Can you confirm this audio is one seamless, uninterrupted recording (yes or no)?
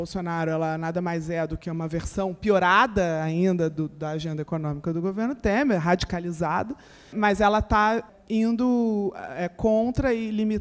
no